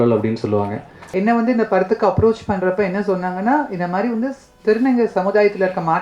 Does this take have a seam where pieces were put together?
yes; 1 cut; at 1.0 s

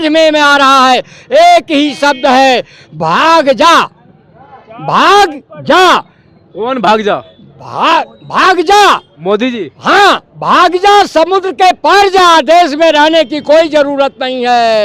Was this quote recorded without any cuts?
yes; 0 cuts

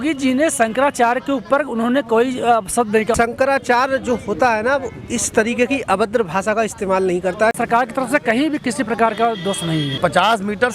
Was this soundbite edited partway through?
yes; 3 cuts; at 3.1 s, 7.6 s, 10.0 s

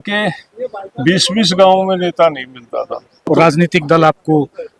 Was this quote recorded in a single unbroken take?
no; 1 cut; at 3.2 s

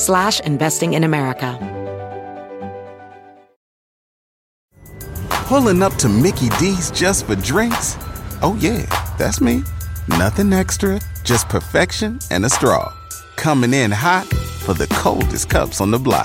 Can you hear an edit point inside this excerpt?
yes; 1 cut; at 1.5 s

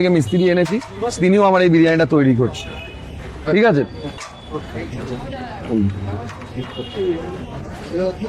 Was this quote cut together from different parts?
no; 0 cuts

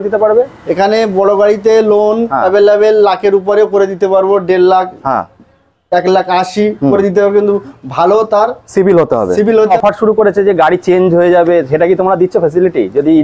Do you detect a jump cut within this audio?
yes; 1 cut; at 9.7 s

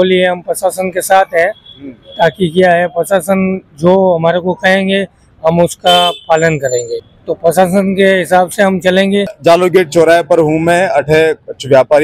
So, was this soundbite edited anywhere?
no; 0 cuts

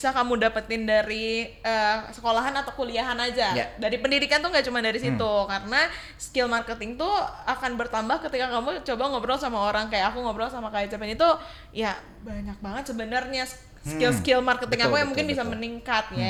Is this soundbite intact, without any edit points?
yes; 0 cuts

